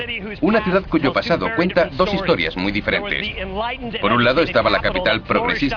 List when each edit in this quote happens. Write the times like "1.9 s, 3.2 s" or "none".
1.2 s